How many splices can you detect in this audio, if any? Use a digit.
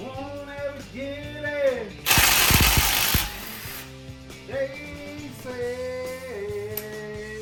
0